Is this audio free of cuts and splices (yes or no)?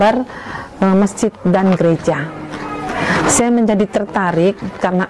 yes